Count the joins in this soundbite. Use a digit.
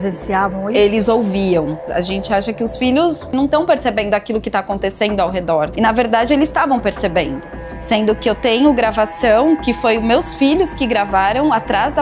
2